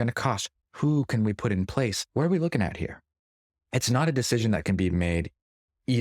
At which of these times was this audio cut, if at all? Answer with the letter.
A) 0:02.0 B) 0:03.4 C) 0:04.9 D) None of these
A